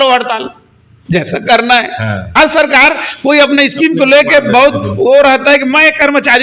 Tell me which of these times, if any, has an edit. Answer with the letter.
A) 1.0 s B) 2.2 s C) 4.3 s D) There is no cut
B